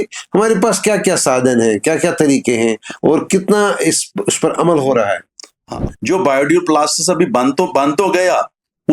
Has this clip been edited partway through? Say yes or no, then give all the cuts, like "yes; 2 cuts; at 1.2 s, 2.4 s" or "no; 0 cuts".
yes; 1 cut; at 5.7 s